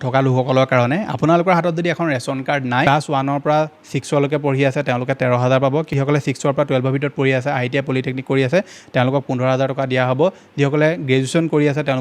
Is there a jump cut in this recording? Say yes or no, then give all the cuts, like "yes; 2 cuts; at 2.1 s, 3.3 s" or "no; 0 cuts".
yes; 1 cut; at 2.9 s